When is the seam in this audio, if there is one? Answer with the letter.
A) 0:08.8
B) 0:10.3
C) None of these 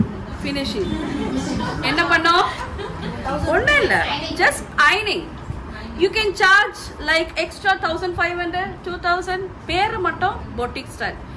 C